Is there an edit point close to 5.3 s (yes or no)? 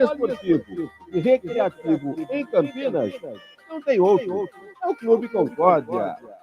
yes